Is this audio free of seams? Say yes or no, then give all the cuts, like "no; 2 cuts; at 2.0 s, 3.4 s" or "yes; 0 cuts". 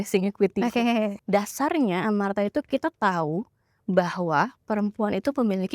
no; 1 cut; at 1.2 s